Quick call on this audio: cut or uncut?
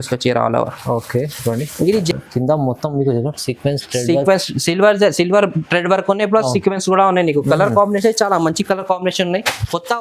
cut